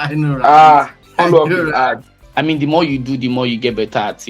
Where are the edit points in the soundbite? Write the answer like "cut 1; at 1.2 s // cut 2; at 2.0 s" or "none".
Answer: cut 1; at 1.0 s // cut 2; at 2.1 s